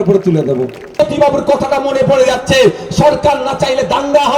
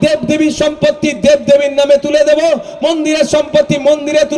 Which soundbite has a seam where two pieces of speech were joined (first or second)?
first